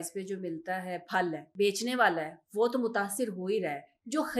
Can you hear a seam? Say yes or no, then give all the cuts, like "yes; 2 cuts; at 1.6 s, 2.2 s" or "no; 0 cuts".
yes; 1 cut; at 1.4 s